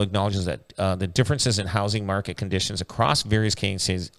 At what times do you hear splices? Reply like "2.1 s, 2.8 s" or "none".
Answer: none